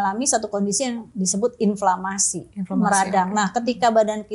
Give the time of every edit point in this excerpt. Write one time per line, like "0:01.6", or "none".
0:01.0